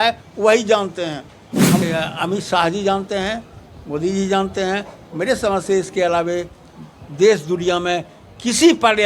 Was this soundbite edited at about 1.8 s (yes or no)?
yes